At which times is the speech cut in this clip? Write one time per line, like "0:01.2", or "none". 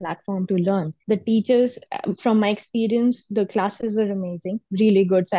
0:00.9